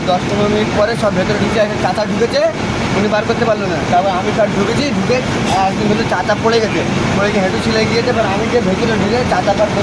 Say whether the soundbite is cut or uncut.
uncut